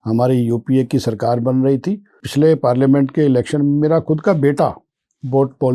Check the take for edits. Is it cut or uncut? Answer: cut